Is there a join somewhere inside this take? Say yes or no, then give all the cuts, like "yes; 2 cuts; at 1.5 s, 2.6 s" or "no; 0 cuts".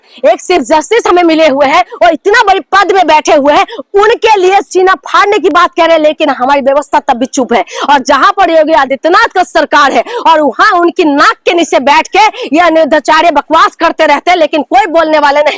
no; 0 cuts